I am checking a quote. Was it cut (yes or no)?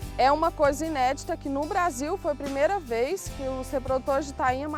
no